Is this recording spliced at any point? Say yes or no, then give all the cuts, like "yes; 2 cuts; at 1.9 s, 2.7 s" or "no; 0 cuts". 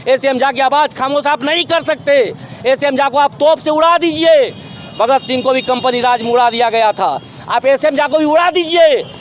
no; 0 cuts